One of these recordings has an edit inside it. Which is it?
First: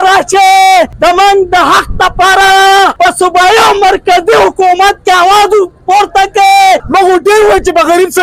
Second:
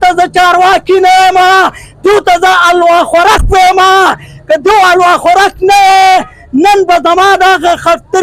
first; 3 cuts; at 0.9 s, 2.9 s, 6.8 s

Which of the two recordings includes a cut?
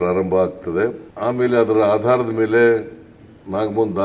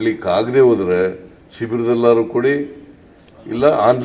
first; 1 cut; at 1.1 s

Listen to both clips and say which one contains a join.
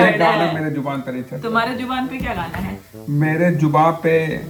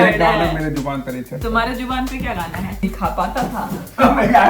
second; 1 cut; at 2.8 s

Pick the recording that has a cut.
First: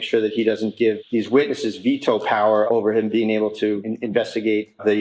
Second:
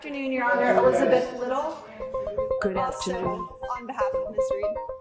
first; 3 cuts; at 1.0 s, 2.7 s, 3.9 s

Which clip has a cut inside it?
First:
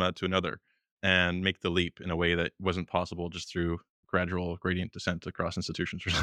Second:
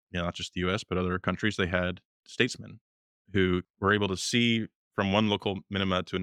second; 4 cuts; at 1.2 s, 2.2 s, 3.7 s, 4.8 s

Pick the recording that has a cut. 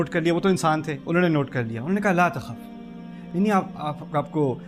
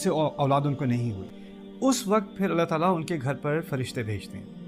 second; 1 cut; at 1.3 s

